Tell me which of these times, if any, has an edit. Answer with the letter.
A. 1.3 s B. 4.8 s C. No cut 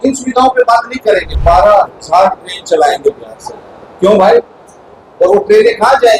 A